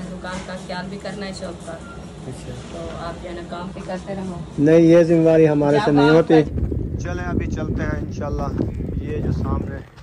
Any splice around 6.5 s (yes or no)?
yes